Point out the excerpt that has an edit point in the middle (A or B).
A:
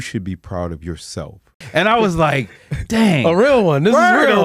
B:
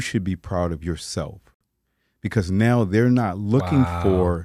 A